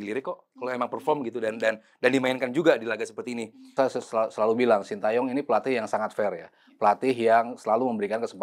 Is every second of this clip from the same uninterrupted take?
no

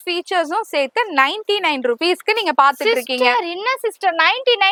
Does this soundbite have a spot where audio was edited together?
no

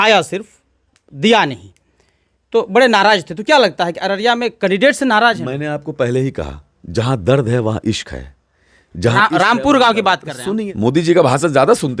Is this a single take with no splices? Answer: no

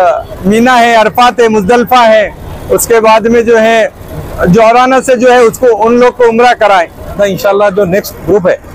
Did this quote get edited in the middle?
yes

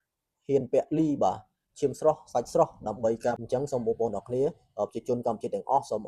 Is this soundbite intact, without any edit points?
no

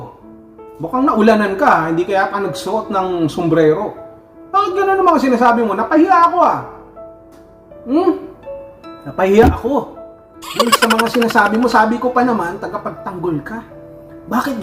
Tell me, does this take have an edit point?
no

